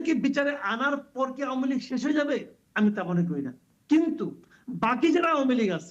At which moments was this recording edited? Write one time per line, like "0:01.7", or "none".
0:03.7